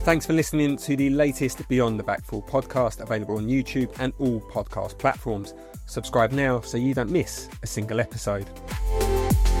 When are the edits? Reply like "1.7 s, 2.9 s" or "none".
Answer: none